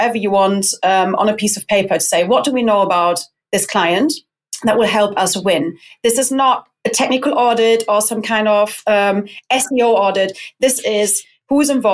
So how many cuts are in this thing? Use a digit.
0